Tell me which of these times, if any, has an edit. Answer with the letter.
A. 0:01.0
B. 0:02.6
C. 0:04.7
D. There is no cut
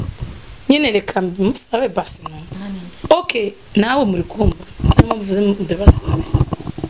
B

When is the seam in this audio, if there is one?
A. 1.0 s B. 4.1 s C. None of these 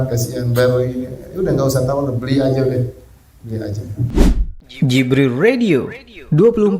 B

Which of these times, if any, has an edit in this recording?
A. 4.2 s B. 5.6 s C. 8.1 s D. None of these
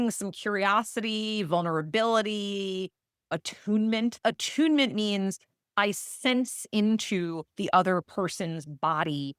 A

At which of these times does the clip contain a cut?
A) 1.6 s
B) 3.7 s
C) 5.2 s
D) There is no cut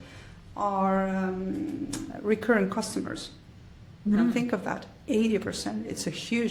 D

